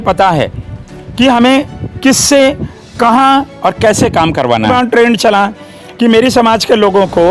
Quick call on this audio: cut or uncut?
cut